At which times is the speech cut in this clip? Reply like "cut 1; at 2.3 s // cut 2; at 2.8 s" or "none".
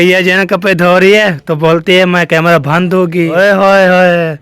cut 1; at 3.3 s